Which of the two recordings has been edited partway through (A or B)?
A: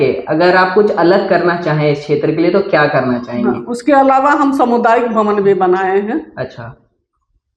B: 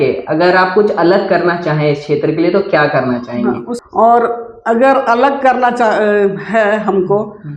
B